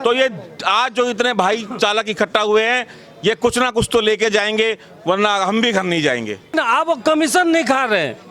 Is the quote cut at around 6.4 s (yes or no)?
yes